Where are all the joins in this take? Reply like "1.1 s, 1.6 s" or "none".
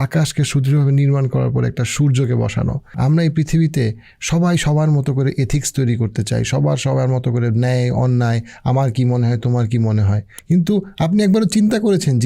2.9 s, 10.3 s